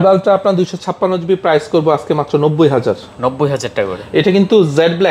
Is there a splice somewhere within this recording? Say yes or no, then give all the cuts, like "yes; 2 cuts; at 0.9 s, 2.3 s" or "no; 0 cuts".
no; 0 cuts